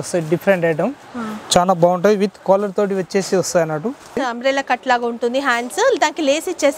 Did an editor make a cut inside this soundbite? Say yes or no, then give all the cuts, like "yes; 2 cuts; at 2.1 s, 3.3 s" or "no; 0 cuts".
yes; 1 cut; at 4.2 s